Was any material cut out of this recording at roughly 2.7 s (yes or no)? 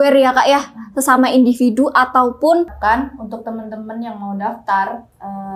yes